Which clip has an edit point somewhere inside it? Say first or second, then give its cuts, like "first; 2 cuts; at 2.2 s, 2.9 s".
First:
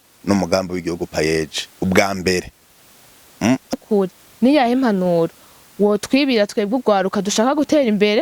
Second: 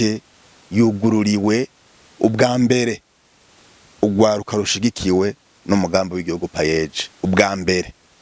first; 1 cut; at 3.7 s